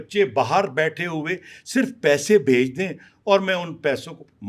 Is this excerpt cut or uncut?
uncut